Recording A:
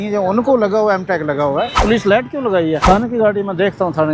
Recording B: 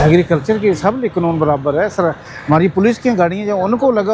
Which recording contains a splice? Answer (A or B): A